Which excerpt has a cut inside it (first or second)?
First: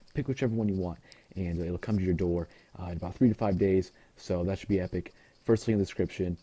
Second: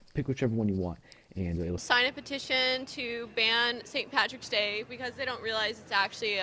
first